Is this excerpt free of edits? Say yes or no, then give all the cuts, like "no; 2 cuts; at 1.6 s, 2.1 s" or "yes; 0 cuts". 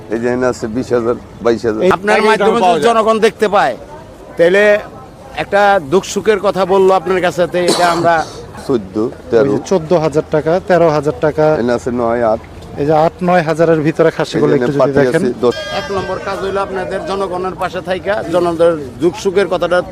no; 3 cuts; at 1.9 s, 8.6 s, 15.5 s